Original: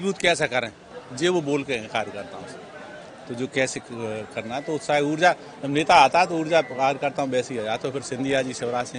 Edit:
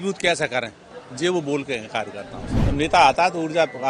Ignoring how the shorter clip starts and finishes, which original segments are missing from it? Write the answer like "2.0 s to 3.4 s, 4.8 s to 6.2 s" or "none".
2.6 s to 5.5 s